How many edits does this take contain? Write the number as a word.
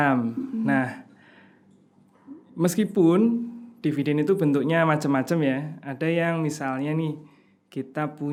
zero